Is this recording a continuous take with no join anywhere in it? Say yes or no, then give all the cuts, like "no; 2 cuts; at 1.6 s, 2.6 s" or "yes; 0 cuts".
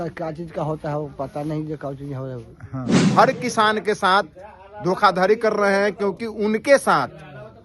no; 1 cut; at 3.0 s